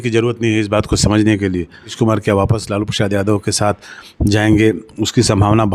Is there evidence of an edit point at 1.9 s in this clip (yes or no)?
yes